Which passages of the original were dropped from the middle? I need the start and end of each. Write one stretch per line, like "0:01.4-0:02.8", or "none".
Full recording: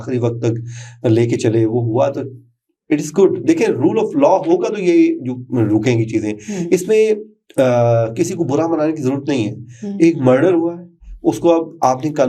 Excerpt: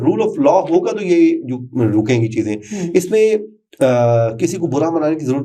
none